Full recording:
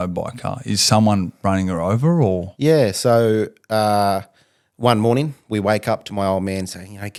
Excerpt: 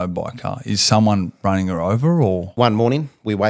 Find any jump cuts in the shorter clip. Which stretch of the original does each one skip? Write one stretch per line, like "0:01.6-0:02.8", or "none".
0:02.5-0:04.7